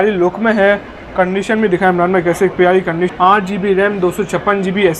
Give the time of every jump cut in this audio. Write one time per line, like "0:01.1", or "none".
0:03.1